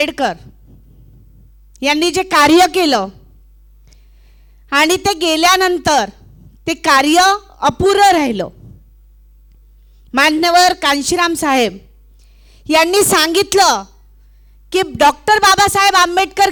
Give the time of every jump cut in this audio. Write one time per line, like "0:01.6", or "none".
none